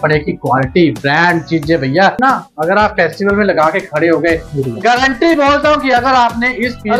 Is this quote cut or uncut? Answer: cut